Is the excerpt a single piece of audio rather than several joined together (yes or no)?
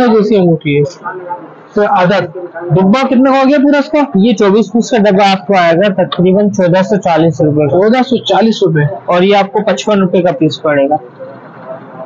yes